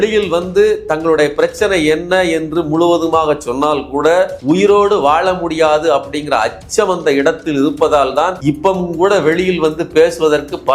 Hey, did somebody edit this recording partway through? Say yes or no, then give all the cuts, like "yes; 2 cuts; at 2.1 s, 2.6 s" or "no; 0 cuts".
yes; 2 cuts; at 4.4 s, 8.4 s